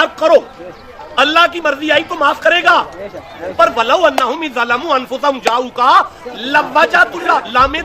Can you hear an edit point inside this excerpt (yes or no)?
no